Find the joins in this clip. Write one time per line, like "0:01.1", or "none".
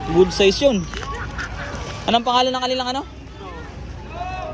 0:01.9